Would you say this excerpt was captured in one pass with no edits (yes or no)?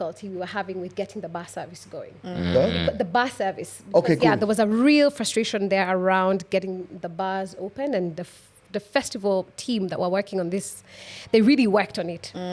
yes